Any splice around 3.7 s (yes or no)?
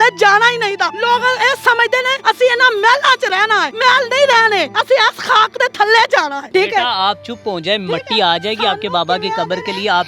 yes